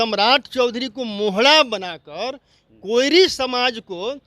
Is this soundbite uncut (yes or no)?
yes